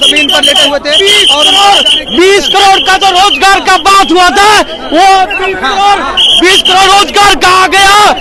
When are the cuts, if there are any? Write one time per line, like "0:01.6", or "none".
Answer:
none